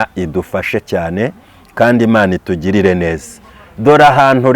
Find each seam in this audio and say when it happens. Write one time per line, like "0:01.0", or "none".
none